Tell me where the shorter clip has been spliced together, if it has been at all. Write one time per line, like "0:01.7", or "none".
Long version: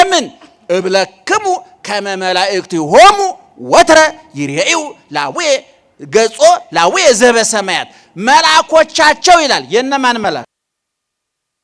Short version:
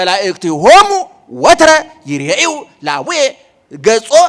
none